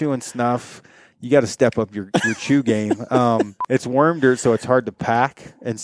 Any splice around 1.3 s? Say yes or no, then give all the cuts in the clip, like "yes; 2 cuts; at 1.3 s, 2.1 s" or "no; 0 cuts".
no; 1 cut; at 3.5 s